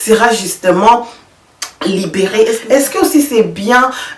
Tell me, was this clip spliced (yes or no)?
yes